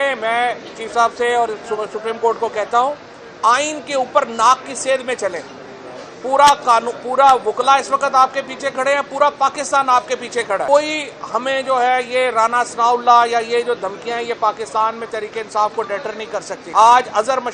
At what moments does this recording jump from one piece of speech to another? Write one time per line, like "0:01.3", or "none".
0:10.6
0:16.6